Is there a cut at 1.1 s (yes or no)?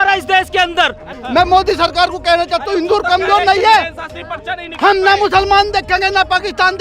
yes